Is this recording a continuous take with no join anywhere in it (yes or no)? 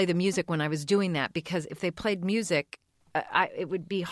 no